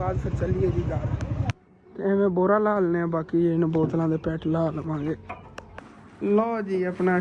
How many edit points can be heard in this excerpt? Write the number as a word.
one